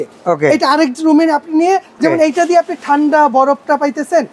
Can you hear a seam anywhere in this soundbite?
yes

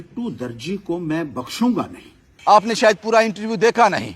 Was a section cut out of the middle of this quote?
yes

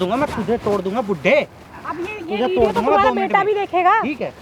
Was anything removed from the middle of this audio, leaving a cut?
no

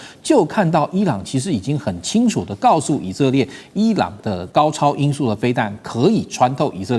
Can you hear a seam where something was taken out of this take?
yes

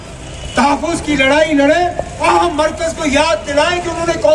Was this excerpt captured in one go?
no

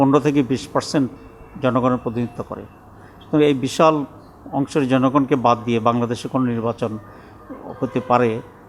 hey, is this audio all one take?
yes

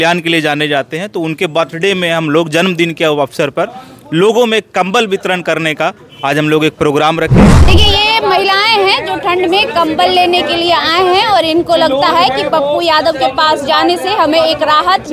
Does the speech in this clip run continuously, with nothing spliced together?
no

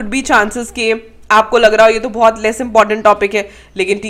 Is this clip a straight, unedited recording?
yes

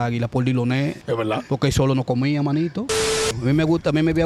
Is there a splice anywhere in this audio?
yes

